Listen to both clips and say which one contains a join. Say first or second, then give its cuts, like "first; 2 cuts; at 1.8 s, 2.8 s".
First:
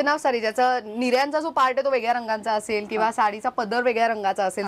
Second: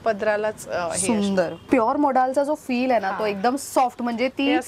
second; 1 cut; at 1.6 s